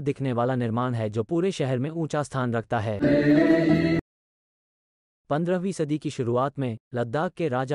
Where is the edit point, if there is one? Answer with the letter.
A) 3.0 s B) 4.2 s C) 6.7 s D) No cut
A